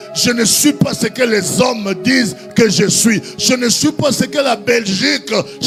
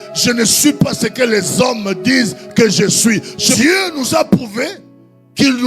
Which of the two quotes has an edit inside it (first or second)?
second